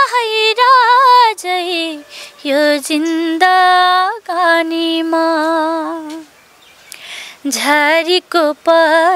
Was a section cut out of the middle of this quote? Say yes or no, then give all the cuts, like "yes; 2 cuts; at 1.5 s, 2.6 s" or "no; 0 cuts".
no; 0 cuts